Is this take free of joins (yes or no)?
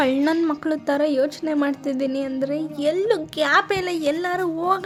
yes